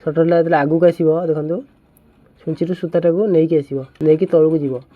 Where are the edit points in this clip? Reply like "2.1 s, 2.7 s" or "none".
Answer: 3.8 s